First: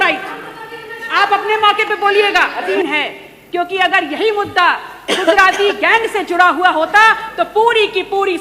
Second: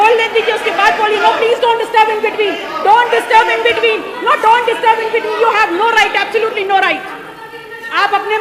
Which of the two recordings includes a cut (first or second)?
first